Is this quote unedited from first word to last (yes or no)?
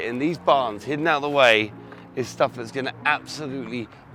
yes